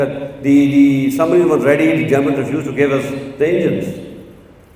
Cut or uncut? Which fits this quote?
uncut